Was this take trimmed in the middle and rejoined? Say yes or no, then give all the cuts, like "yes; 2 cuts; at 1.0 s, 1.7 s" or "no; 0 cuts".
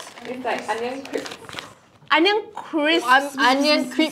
no; 0 cuts